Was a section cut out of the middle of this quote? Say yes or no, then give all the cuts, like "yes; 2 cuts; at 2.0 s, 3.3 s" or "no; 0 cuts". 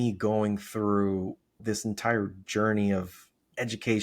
no; 0 cuts